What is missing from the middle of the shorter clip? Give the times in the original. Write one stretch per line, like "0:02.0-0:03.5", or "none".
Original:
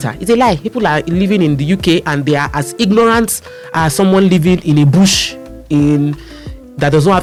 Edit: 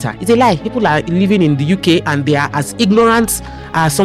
none